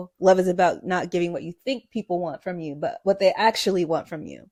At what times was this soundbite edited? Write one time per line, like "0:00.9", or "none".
none